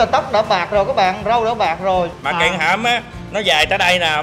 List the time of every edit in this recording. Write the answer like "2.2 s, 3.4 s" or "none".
2.1 s

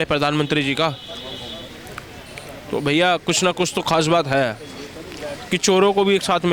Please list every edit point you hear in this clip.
none

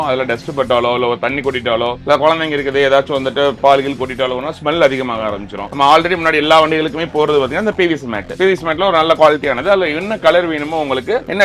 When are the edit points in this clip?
none

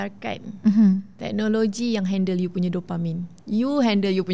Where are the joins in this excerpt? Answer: none

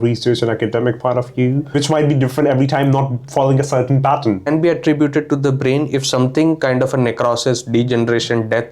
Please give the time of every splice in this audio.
1.7 s, 4.5 s

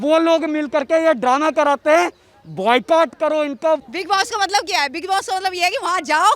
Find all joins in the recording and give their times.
3.9 s

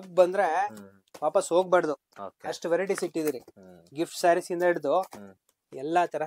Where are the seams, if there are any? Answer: none

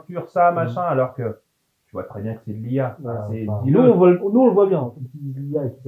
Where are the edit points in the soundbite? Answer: 4.9 s

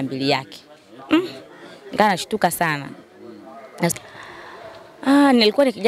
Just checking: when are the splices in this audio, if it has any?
4.0 s

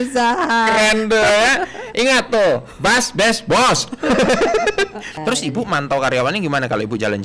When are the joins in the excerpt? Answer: 5.2 s

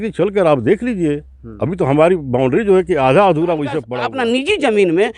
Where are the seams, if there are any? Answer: 4.0 s

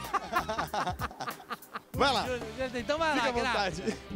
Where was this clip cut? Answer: none

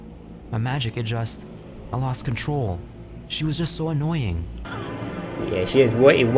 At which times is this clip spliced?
4.7 s

